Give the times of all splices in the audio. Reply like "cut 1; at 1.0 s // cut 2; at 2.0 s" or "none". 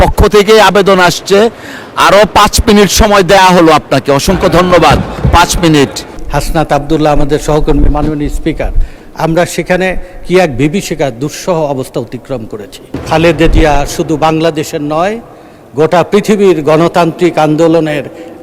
cut 1; at 6.2 s // cut 2; at 13.0 s

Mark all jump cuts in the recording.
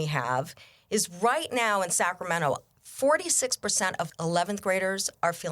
cut 1; at 4.1 s

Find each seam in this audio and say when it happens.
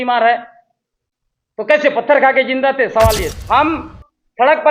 cut 1; at 3.3 s

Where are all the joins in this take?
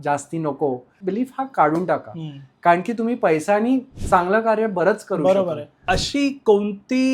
cut 1; at 1.0 s // cut 2; at 5.7 s

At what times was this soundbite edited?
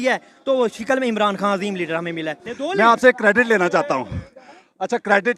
cut 1; at 2.4 s

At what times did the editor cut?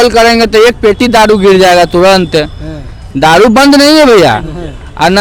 none

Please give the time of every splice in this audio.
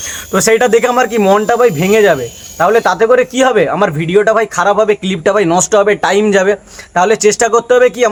none

